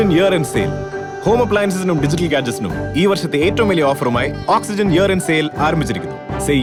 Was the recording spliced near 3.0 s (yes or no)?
no